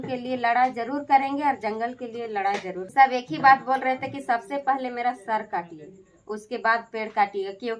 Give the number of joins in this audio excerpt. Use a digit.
1